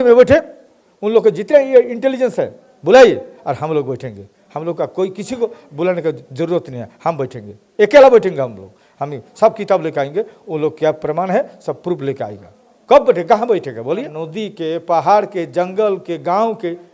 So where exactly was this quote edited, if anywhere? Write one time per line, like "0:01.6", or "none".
0:14.2